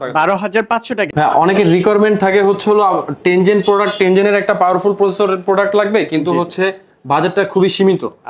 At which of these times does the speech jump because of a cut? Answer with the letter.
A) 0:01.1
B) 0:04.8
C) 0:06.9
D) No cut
A